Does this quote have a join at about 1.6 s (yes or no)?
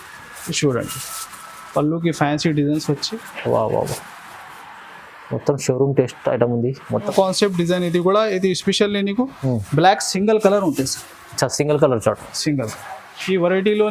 no